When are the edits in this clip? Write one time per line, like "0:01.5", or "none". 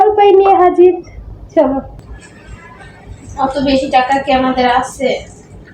0:02.0